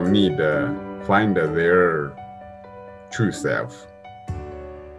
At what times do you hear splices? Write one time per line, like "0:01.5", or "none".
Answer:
none

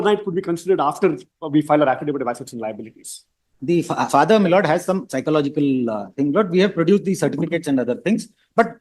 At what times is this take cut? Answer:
0:03.5

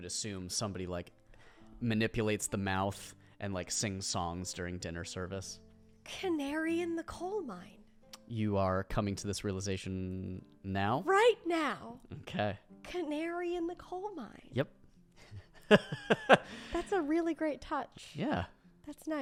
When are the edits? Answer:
none

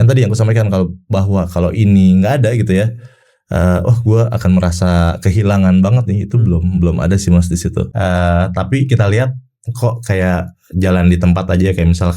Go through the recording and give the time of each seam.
0:07.9

